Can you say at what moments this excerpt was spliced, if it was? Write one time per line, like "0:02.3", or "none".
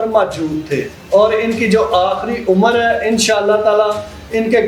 0:01.0